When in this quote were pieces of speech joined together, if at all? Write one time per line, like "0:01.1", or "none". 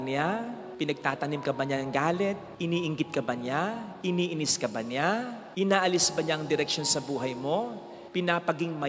0:08.0